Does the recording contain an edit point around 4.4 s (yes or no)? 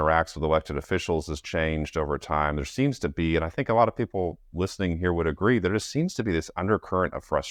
no